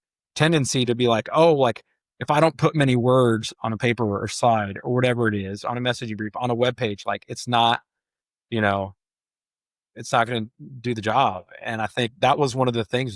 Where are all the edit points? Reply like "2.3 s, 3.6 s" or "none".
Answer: none